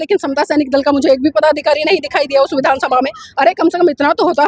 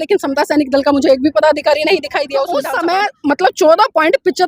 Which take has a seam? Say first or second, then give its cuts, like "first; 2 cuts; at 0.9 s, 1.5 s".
second; 1 cut; at 2.5 s